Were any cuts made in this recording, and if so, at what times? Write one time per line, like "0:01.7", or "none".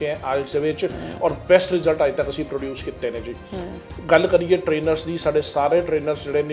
none